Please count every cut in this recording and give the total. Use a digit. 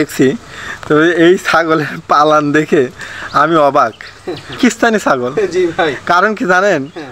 1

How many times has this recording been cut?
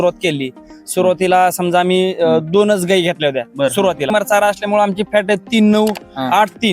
1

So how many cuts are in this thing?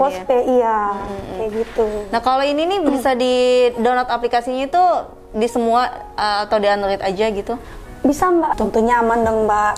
1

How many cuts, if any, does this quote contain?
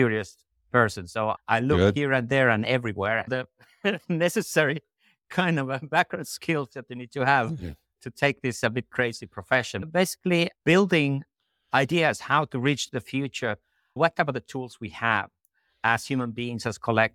2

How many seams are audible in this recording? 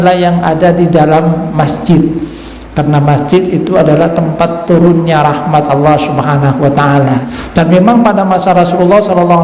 1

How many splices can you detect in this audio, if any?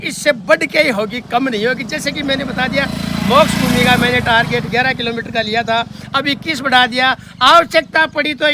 0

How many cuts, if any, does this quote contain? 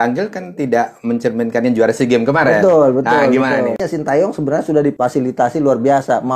2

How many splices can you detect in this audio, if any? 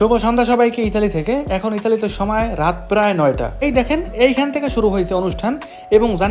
1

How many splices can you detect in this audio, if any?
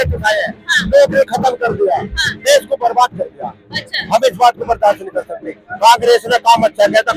0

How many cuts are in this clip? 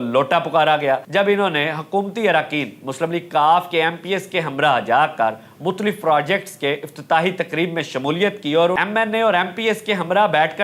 2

